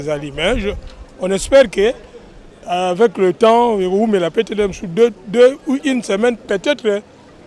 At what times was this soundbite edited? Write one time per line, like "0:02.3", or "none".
none